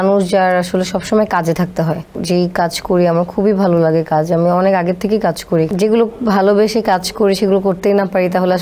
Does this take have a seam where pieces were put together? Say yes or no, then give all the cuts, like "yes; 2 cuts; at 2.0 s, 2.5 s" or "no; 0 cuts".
yes; 2 cuts; at 2.2 s, 5.7 s